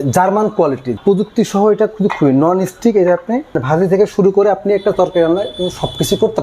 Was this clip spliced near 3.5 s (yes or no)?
yes